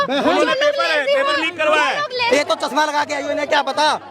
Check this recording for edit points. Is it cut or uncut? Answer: cut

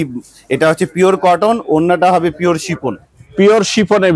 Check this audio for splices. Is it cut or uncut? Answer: uncut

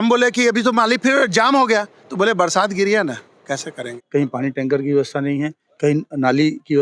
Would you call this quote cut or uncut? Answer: cut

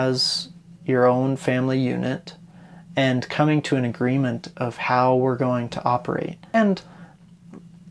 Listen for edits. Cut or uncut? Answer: cut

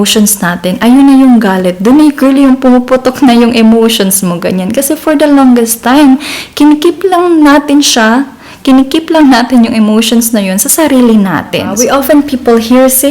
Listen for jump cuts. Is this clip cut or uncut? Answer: cut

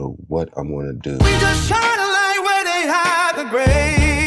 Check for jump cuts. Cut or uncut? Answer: cut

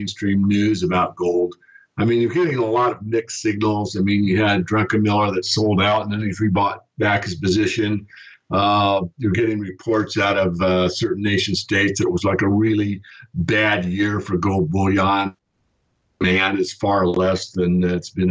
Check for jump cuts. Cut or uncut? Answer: cut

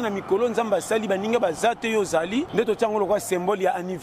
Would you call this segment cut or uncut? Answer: cut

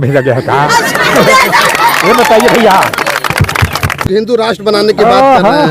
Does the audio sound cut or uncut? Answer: cut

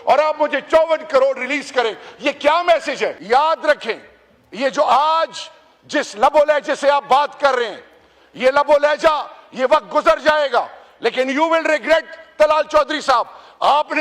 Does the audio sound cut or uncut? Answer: cut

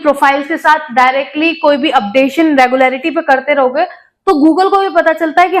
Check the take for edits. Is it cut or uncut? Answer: uncut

